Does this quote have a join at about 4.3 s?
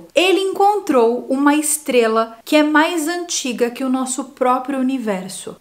no; 0 cuts

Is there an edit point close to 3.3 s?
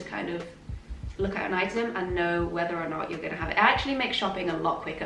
no; 0 cuts

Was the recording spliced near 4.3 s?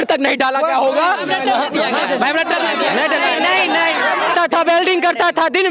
yes; 1 cut; at 4.3 s

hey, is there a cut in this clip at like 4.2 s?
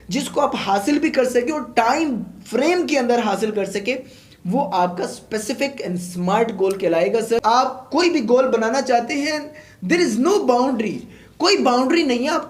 no; 1 cut; at 7.4 s

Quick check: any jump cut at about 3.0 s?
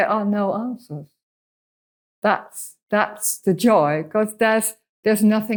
no; 0 cuts

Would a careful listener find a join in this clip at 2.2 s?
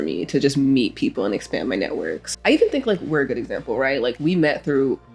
yes; 1 cut; at 2.2 s

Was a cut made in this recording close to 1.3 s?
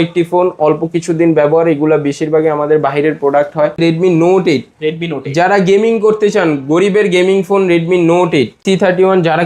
no; 2 cuts; at 3.8 s, 8.6 s

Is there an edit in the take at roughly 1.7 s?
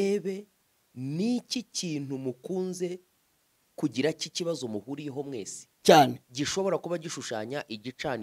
no; 0 cuts

